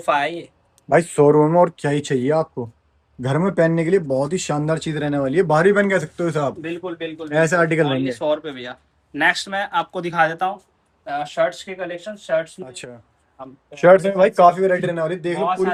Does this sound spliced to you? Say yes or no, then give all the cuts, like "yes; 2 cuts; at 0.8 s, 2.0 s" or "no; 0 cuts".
no; 0 cuts